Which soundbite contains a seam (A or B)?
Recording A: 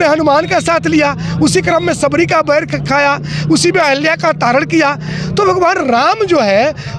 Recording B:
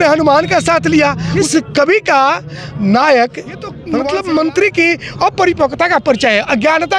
B